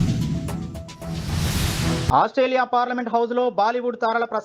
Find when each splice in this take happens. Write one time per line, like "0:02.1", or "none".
0:02.1